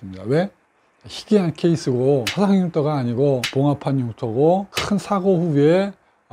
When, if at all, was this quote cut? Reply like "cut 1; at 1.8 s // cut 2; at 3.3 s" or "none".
none